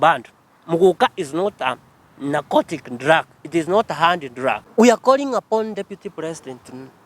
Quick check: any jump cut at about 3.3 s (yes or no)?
no